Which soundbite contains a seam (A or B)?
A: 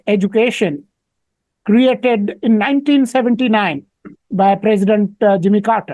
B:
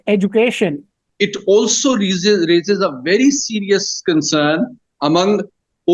B